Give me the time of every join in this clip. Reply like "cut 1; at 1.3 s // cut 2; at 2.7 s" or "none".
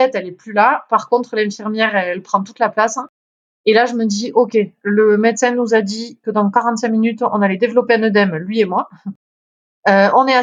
none